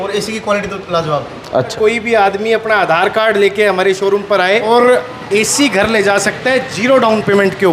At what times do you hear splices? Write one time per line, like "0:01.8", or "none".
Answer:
0:01.7
0:04.7